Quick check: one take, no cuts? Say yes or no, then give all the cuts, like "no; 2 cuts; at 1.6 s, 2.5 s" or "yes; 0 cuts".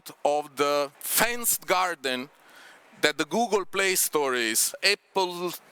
no; 2 cuts; at 1.0 s, 4.8 s